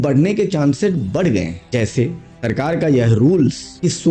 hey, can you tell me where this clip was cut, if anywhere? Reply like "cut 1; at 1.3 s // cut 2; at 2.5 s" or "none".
none